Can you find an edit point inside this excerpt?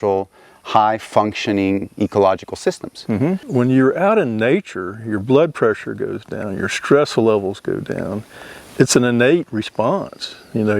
yes; 1 cut; at 3.4 s

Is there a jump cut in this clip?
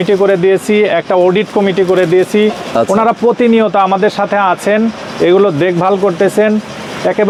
no; 0 cuts

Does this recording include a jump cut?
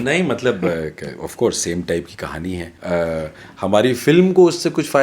yes; 1 cut; at 2.7 s

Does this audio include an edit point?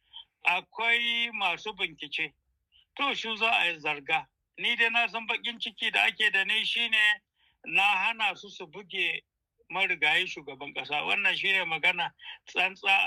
no; 0 cuts

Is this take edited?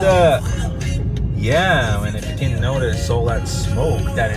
no; 0 cuts

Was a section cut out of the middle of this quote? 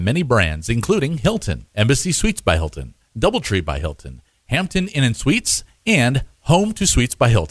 yes; 1 cut; at 1.2 s

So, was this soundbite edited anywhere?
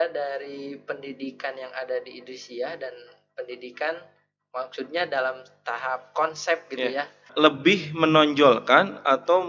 yes; 1 cut; at 7.2 s

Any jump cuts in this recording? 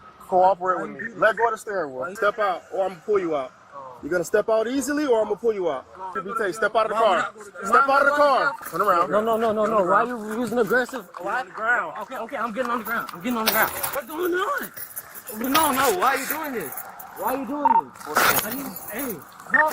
yes; 4 cuts; at 2.0 s, 6.2 s, 8.6 s, 13.9 s

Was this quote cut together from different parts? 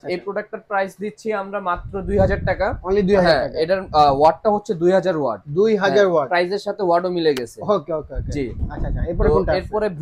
no; 0 cuts

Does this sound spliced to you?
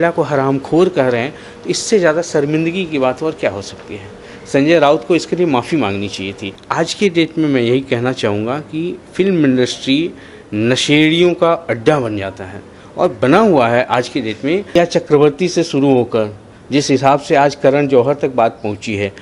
yes; 2 cuts; at 6.6 s, 14.8 s

